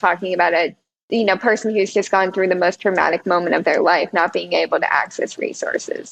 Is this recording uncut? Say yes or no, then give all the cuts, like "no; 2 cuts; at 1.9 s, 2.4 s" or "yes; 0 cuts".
yes; 0 cuts